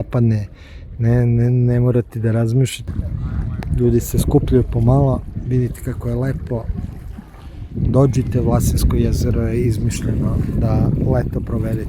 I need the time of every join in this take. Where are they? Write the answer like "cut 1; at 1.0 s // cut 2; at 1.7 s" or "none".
cut 1; at 2.9 s